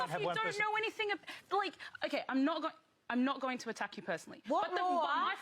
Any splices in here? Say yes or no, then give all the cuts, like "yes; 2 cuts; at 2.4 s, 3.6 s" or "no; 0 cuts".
yes; 1 cut; at 3.6 s